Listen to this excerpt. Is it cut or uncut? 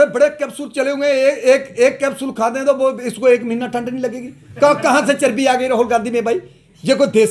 uncut